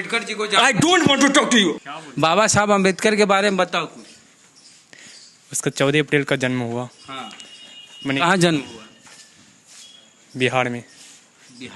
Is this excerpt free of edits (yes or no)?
no